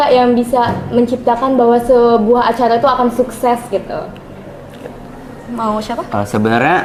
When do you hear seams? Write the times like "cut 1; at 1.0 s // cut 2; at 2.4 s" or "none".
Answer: none